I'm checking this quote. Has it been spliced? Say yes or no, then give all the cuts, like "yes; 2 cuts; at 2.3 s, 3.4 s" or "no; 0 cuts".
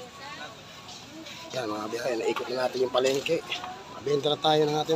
no; 0 cuts